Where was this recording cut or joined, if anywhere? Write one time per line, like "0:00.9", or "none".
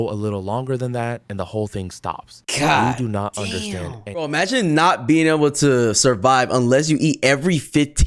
0:04.2